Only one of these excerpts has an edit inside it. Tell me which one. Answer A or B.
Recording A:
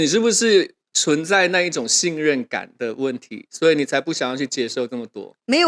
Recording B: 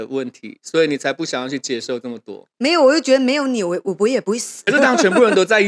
B